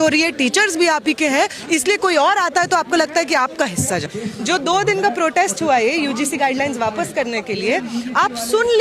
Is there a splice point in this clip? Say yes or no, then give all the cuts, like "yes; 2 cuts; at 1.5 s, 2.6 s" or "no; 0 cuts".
yes; 1 cut; at 4.1 s